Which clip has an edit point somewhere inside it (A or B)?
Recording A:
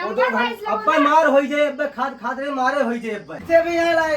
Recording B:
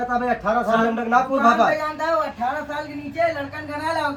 A